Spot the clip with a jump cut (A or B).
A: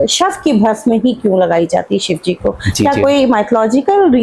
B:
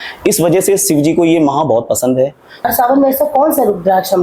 B